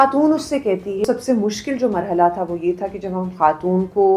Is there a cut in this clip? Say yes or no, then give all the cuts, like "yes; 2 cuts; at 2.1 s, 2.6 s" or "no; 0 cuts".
yes; 1 cut; at 1.0 s